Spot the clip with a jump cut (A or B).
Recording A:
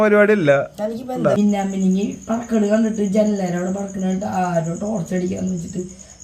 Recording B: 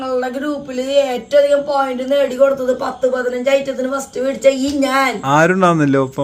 A